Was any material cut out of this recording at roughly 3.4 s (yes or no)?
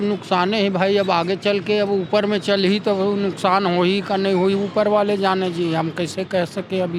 no